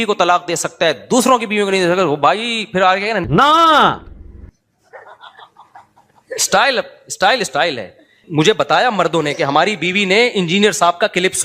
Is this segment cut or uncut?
cut